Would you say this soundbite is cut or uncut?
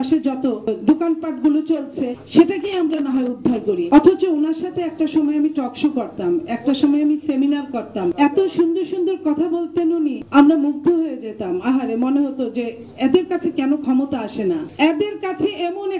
cut